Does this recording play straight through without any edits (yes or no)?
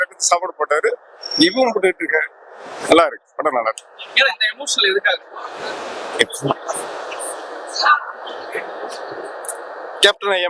yes